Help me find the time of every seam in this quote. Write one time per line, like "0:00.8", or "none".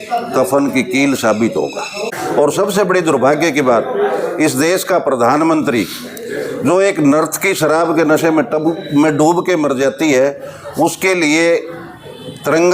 0:02.0